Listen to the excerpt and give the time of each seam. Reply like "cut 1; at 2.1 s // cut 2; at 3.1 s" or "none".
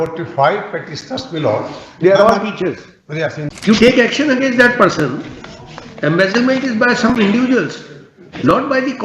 cut 1; at 3.5 s